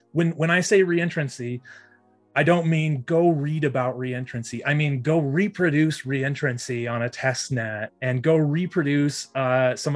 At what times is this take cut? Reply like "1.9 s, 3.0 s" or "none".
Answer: none